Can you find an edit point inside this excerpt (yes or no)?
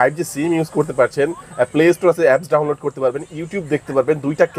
no